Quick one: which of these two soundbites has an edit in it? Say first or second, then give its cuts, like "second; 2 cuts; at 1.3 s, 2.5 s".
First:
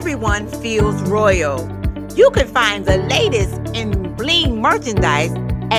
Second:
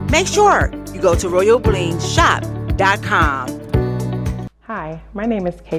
second; 1 cut; at 4.5 s